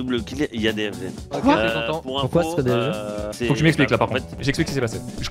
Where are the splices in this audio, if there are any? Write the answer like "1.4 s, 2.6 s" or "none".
1.2 s, 4.4 s